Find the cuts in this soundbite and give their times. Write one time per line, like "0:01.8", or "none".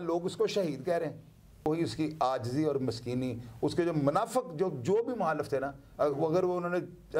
0:01.7